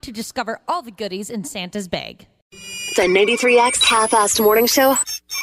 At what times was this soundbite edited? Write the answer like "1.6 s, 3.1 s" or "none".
2.2 s